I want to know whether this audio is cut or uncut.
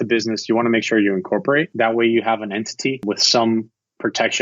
cut